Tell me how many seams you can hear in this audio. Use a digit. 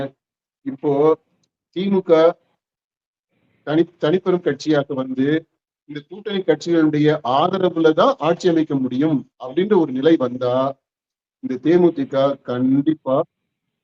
0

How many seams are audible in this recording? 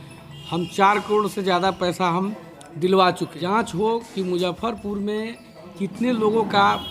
1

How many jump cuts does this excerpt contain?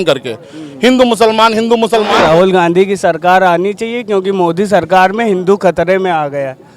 1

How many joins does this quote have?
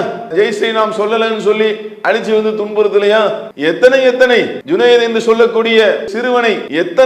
3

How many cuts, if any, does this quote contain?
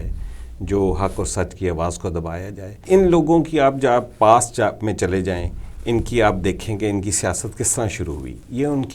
1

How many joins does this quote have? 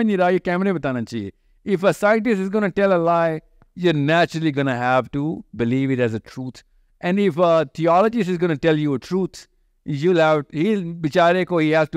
0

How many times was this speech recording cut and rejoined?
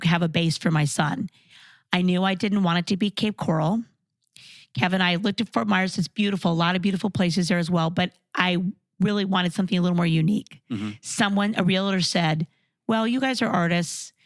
0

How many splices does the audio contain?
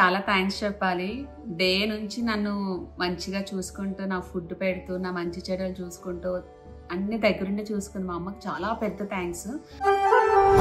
0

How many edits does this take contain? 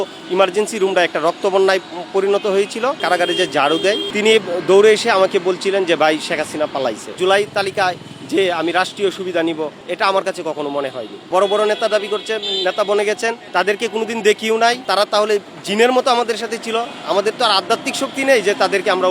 5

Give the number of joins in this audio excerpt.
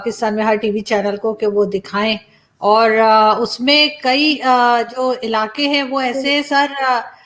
0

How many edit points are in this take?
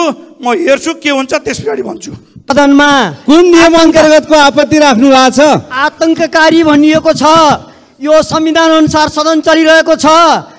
1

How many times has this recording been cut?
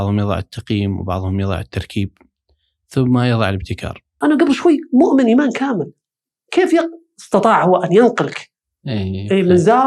1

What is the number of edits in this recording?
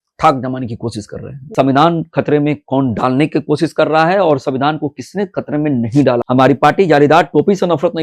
2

